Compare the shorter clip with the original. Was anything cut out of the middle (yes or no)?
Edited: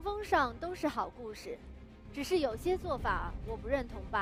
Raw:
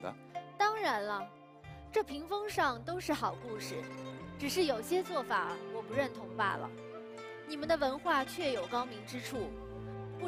no